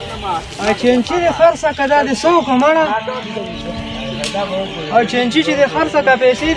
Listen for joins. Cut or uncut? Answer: uncut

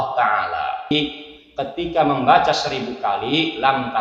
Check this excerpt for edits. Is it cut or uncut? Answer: cut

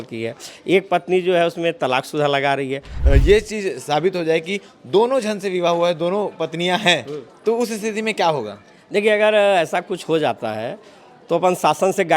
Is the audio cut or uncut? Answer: cut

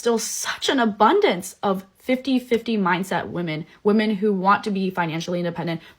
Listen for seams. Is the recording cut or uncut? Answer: cut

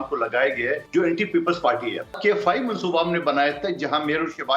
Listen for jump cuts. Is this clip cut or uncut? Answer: cut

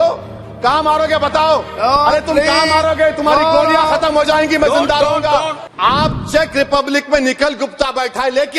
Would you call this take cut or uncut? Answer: cut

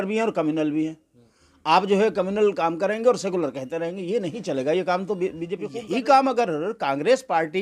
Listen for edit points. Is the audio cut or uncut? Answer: cut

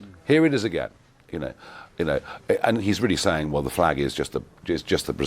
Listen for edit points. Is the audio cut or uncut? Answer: uncut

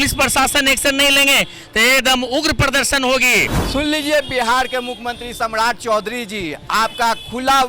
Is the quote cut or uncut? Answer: cut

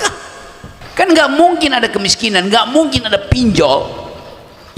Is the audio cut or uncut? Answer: cut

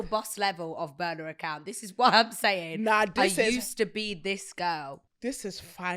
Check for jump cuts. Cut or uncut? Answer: cut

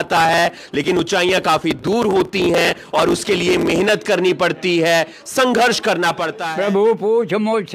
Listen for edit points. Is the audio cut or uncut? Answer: cut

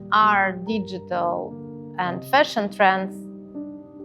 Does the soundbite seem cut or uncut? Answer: uncut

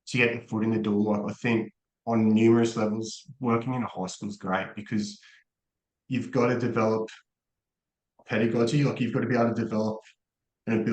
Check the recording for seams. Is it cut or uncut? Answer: uncut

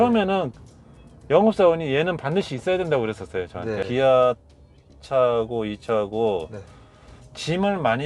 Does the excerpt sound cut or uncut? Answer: cut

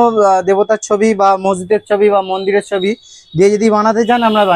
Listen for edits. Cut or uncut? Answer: uncut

